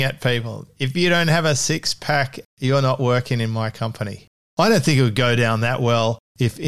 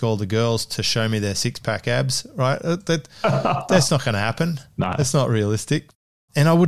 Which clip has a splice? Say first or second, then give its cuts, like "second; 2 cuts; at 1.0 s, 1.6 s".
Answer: first; 1 cut; at 4.5 s